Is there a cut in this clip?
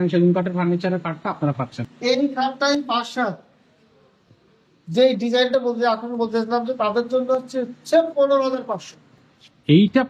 yes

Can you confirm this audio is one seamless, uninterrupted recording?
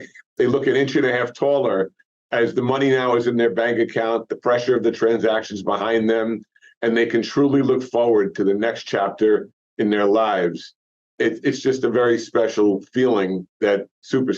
no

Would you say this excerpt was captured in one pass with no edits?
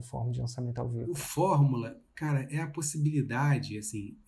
no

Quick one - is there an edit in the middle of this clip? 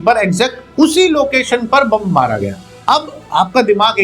no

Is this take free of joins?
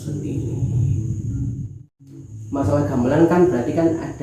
no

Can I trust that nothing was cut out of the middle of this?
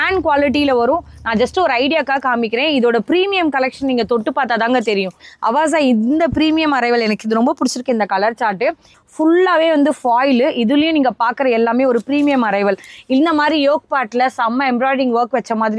no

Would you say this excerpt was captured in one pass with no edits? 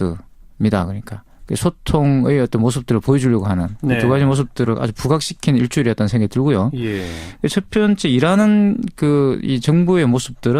no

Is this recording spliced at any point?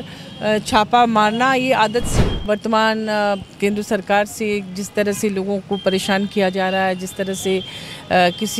yes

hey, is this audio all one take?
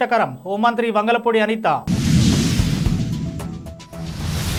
yes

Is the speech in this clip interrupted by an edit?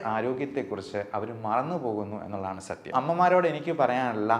yes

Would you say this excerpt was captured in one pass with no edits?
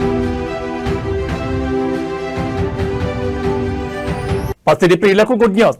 no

